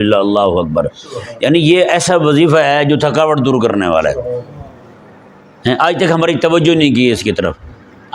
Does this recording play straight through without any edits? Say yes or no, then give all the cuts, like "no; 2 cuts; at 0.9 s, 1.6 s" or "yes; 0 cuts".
yes; 0 cuts